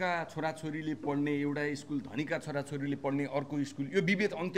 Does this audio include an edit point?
no; 0 cuts

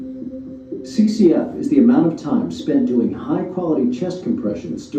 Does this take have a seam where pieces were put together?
yes; 1 cut; at 1.0 s

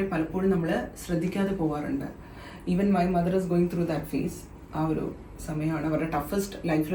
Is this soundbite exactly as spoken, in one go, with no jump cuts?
yes; 0 cuts

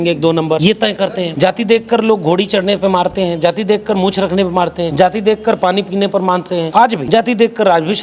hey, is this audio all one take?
no; 3 cuts; at 0.9 s, 4.9 s, 6.8 s

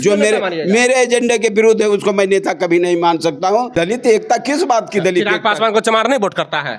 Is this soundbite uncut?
no; 1 cut; at 3.7 s

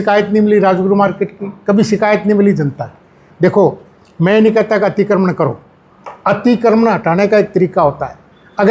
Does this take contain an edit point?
no; 0 cuts

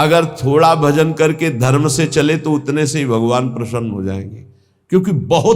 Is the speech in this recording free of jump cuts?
yes; 0 cuts

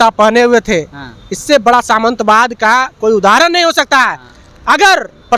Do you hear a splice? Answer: no; 0 cuts

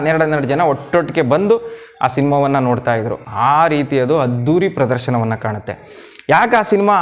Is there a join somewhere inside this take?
no; 0 cuts

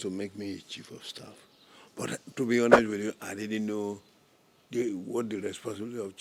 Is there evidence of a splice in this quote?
no; 0 cuts

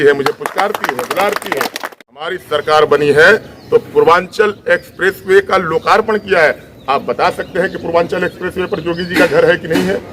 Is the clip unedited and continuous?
no; 1 cut; at 2.4 s

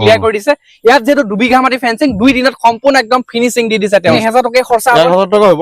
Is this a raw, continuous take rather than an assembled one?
no; 1 cut; at 4.2 s

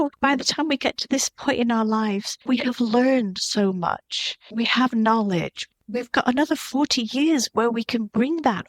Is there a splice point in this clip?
no; 0 cuts

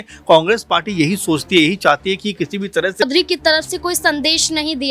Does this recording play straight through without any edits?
no; 1 cut; at 3.0 s

